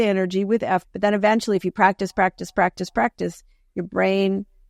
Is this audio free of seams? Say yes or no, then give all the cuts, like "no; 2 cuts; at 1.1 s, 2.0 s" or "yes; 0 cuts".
yes; 0 cuts